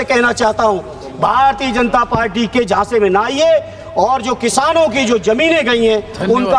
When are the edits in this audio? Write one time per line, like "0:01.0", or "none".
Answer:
none